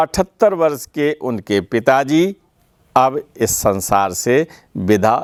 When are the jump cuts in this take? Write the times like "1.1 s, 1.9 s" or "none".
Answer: none